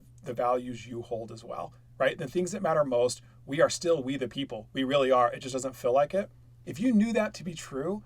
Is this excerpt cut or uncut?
cut